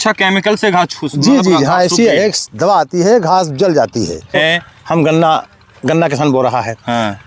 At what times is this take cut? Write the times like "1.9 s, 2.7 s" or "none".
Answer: 4.4 s